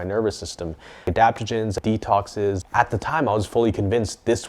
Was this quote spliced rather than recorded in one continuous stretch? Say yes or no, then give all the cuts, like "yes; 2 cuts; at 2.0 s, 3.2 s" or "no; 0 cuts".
yes; 3 cuts; at 1.0 s, 1.8 s, 2.6 s